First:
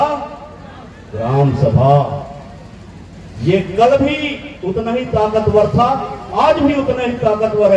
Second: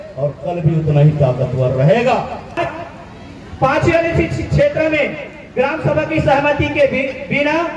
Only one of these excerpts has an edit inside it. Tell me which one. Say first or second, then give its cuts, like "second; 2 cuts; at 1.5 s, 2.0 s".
second; 1 cut; at 2.6 s